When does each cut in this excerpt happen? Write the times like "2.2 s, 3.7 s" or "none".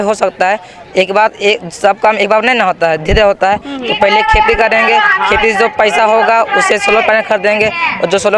none